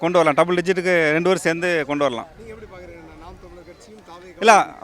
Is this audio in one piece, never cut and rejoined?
yes; 0 cuts

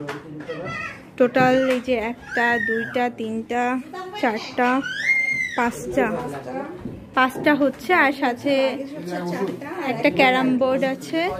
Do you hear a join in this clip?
no; 0 cuts

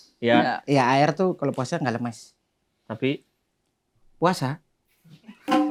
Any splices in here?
no; 0 cuts

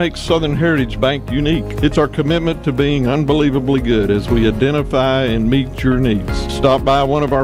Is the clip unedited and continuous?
yes; 0 cuts

